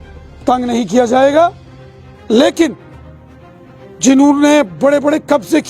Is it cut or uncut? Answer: uncut